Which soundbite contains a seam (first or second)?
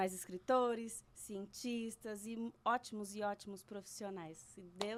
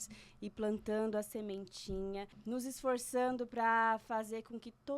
second